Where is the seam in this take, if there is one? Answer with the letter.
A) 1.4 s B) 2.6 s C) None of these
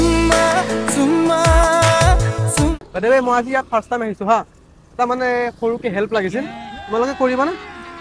B